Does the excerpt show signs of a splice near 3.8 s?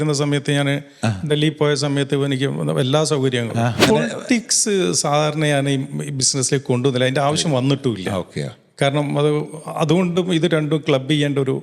yes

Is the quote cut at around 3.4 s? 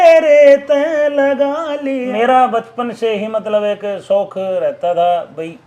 no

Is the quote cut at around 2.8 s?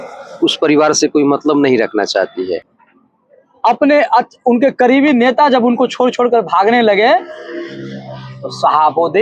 yes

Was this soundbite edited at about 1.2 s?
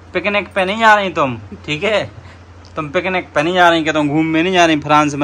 no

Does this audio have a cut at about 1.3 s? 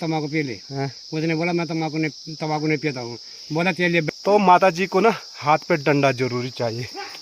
no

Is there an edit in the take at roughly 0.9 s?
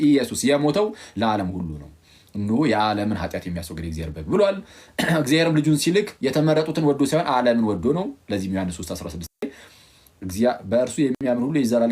no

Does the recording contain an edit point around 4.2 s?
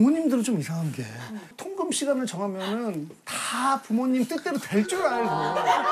no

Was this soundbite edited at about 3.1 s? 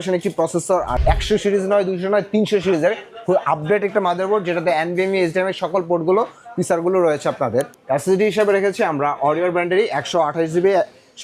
no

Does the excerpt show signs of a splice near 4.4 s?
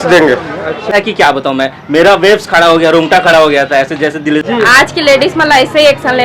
yes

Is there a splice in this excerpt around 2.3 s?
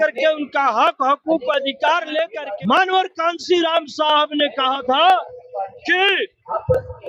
yes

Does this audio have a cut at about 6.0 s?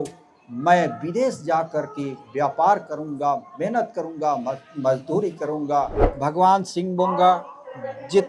yes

